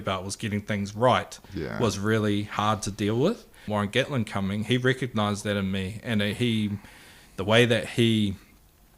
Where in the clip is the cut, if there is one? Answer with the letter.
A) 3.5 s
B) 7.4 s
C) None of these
A